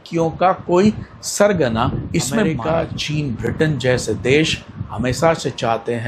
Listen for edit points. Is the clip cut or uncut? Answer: cut